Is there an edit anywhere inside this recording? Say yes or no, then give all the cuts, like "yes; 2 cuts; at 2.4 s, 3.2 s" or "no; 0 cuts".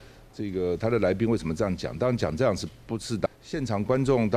yes; 1 cut; at 3.3 s